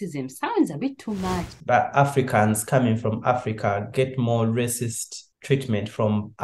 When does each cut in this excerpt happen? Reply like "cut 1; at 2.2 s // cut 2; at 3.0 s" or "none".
cut 1; at 1.5 s